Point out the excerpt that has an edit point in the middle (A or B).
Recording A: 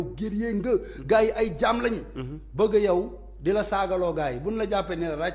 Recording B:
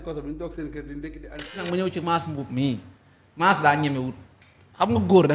B